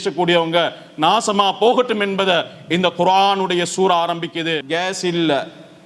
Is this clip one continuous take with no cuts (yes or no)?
no